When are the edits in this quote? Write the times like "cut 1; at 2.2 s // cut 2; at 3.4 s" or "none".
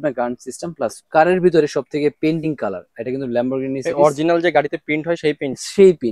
cut 1; at 1.0 s